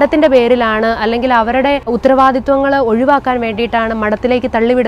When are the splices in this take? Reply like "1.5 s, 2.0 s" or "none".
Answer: 1.9 s